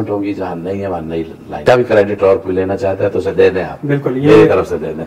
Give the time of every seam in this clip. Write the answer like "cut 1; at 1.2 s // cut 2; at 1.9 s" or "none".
cut 1; at 1.6 s